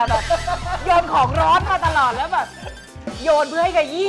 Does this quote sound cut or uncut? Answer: uncut